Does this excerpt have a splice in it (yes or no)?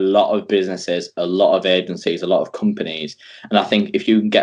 no